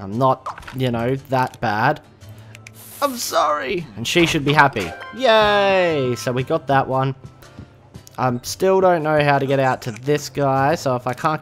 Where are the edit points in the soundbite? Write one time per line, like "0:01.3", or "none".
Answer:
0:02.0